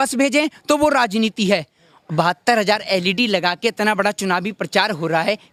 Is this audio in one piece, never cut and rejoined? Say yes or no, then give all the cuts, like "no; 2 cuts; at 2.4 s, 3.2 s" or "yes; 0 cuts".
yes; 0 cuts